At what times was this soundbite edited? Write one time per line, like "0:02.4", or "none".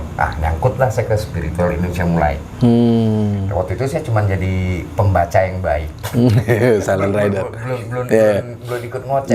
none